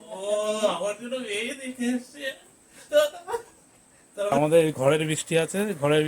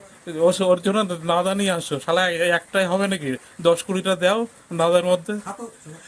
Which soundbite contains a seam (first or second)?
first